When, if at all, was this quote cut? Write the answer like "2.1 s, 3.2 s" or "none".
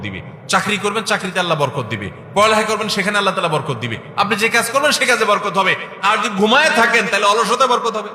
none